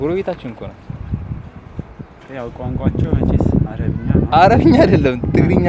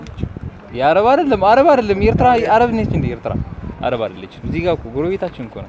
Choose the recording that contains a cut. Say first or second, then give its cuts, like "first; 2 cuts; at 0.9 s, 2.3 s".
second; 1 cut; at 3.6 s